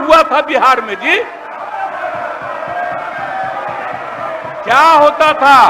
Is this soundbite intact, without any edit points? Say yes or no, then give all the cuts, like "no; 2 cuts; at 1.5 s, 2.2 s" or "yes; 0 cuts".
yes; 0 cuts